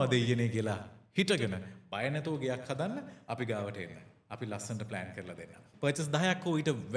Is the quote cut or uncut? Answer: cut